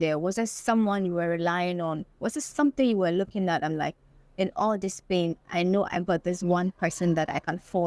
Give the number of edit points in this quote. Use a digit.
0